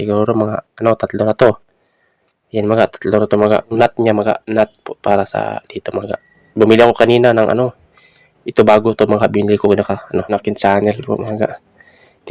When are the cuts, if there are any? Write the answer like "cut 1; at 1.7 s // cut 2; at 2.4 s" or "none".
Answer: cut 1; at 3.7 s // cut 2; at 10.3 s

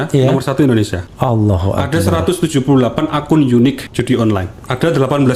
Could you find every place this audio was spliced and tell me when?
cut 1; at 1.0 s // cut 2; at 4.2 s

